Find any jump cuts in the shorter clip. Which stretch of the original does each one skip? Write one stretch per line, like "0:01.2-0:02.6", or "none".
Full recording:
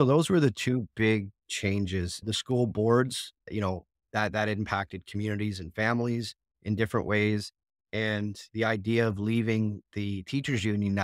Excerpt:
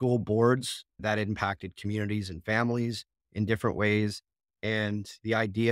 0:03.5-0:04.3